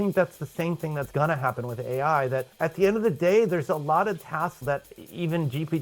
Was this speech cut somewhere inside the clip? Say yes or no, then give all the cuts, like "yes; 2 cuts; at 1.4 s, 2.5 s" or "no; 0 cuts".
yes; 1 cut; at 2.5 s